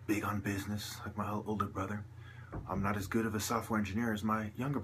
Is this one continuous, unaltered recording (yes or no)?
no